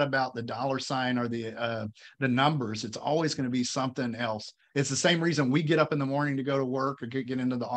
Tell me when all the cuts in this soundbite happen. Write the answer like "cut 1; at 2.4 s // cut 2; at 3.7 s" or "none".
none